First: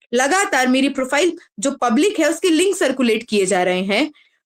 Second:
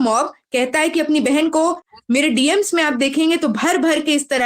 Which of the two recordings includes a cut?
second; 1 cut; at 1.9 s

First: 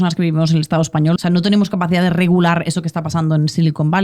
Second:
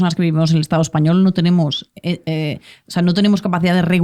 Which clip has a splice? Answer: first; 1 cut; at 1.2 s

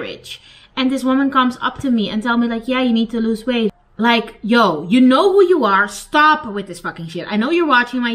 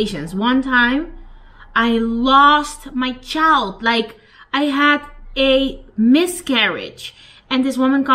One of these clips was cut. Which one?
first; 1 cut; at 3.7 s

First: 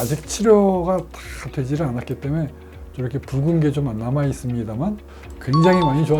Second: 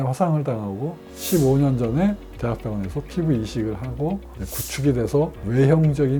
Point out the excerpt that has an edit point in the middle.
first; 1 cut; at 5.1 s

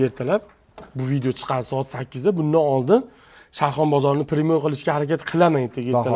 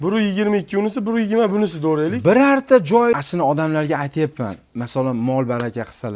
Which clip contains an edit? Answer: second; 1 cut; at 3.2 s

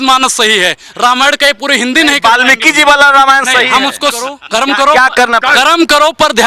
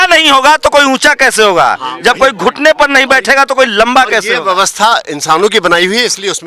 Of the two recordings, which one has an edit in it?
first; 1 cut; at 4.4 s

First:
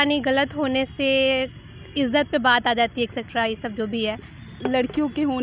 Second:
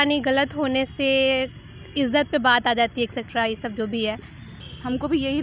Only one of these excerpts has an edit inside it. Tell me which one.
second; 1 cut; at 4.5 s

